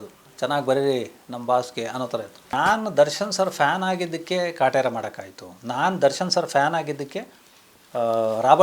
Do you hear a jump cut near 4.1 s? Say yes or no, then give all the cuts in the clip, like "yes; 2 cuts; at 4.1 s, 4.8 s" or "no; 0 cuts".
no; 1 cut; at 2.6 s